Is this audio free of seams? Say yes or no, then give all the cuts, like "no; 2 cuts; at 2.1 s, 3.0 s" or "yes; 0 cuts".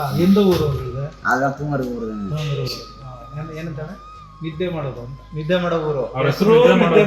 yes; 0 cuts